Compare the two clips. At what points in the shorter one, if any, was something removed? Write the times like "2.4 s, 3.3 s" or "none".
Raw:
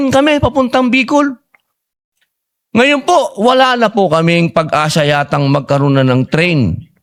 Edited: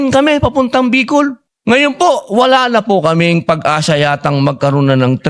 1.5 s

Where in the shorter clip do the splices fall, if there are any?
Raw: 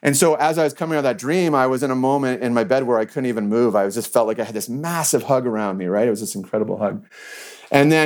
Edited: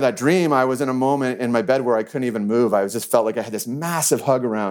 none

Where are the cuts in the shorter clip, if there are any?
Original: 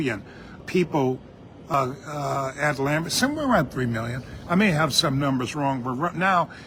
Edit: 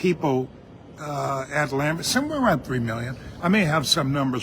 0.9 s

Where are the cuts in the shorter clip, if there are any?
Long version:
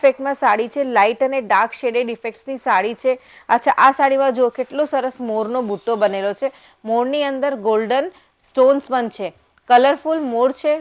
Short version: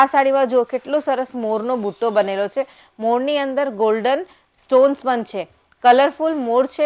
none

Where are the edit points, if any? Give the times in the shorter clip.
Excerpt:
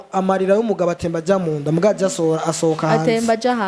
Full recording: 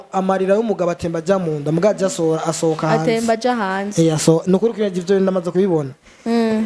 none

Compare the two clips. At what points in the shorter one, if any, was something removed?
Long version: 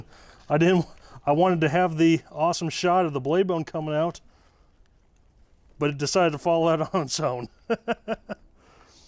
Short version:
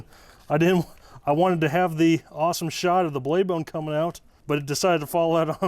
4.3 s

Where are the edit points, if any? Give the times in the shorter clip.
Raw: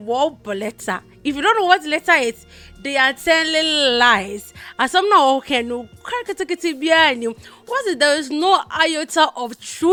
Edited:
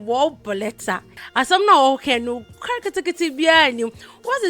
1.1 s

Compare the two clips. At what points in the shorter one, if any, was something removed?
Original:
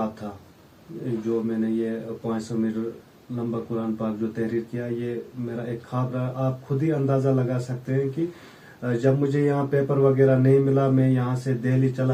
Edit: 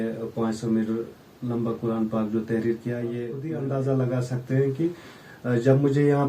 3.5 s

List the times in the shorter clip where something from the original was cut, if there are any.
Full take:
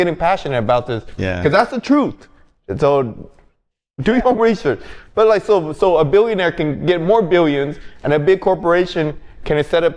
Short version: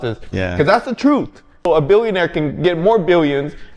1.7 s

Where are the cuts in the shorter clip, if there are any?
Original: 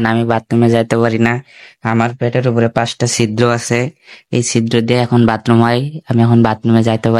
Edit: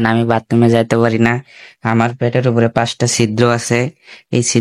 none

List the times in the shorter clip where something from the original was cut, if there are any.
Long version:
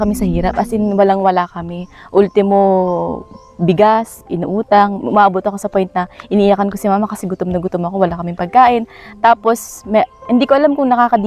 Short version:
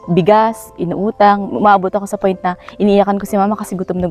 none

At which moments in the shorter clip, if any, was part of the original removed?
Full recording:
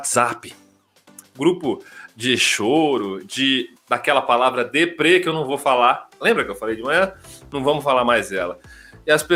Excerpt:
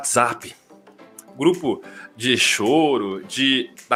none

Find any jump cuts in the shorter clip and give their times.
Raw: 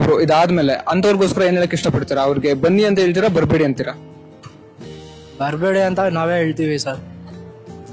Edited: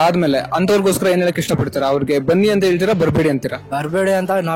3.6 s

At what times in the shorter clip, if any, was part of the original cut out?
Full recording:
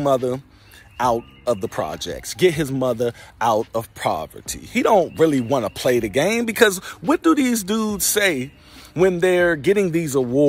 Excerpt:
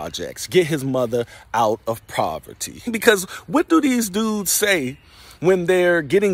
2.8 s

